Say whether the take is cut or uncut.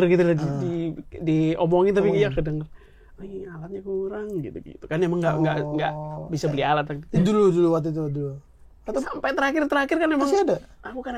uncut